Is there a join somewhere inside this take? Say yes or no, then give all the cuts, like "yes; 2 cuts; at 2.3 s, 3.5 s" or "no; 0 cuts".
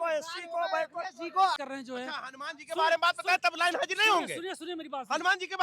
yes; 1 cut; at 1.6 s